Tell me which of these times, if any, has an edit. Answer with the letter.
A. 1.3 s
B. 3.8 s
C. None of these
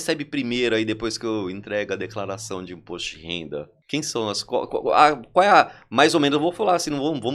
B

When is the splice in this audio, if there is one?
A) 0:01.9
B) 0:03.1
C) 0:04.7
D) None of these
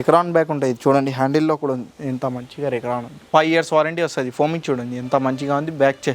B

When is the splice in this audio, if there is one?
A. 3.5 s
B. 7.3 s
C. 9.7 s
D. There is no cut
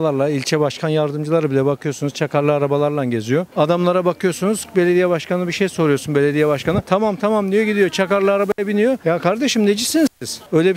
A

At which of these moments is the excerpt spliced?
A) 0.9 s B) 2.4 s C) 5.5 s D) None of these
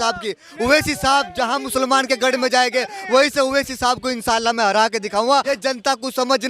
C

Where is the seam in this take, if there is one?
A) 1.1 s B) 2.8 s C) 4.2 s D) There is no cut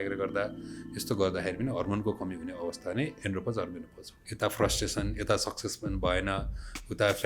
C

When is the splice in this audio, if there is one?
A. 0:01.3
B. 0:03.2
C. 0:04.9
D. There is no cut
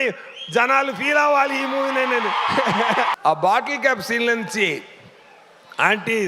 B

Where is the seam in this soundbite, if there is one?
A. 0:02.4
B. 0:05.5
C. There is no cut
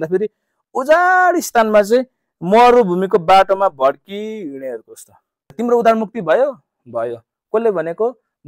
B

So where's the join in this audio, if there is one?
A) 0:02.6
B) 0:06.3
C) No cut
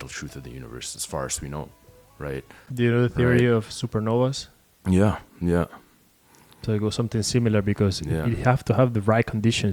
A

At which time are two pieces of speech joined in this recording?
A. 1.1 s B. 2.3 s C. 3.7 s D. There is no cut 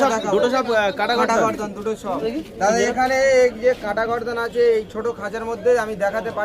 B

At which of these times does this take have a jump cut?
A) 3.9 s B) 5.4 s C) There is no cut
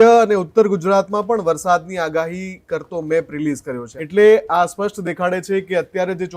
A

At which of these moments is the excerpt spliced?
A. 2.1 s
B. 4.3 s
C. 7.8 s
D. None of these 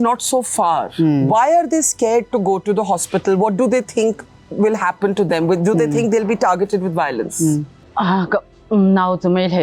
C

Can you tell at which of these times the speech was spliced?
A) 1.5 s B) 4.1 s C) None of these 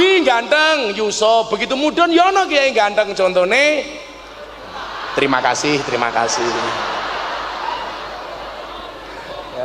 C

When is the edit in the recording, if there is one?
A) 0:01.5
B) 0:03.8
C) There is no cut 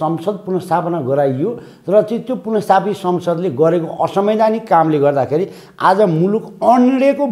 C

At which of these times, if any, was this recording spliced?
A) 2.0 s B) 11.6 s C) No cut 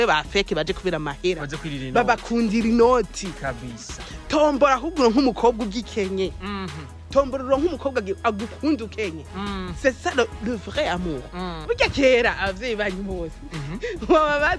B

